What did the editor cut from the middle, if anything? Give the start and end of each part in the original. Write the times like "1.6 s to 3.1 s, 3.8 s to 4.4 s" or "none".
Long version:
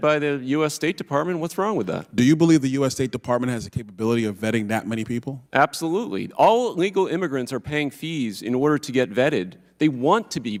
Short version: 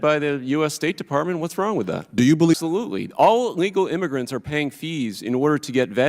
2.5 s to 5.7 s